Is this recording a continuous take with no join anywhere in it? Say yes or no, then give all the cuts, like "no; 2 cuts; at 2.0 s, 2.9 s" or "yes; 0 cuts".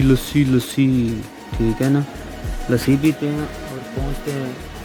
yes; 0 cuts